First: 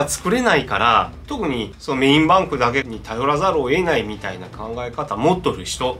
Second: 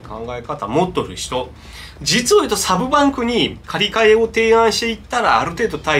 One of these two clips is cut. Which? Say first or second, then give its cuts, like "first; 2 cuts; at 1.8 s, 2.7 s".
first; 1 cut; at 1.2 s